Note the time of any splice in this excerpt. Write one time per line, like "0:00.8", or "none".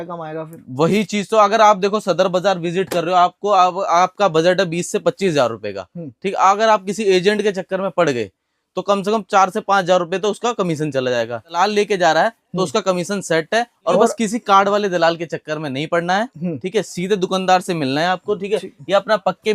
0:11.6
0:13.9